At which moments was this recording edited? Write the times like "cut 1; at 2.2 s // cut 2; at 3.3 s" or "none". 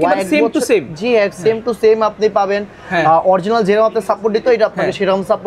none